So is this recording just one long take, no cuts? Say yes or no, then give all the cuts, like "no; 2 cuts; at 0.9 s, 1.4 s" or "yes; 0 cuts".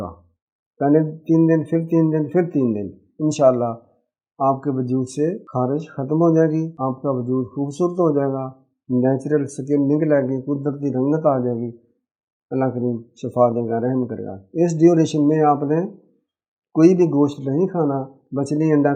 no; 2 cuts; at 5.4 s, 6.7 s